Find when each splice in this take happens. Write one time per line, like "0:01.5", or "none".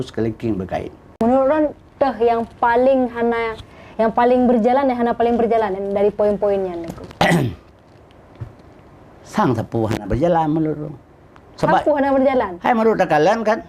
0:01.2